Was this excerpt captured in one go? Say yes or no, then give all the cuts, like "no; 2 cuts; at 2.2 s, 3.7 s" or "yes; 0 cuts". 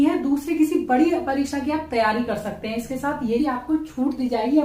no; 1 cut; at 3.4 s